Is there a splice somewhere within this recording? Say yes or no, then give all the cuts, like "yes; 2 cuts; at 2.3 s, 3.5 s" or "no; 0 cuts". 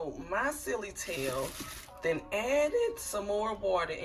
no; 0 cuts